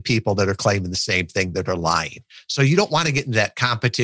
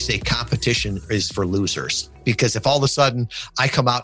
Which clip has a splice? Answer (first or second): second